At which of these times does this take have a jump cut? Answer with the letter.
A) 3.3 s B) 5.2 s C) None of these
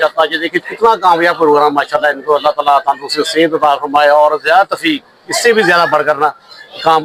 C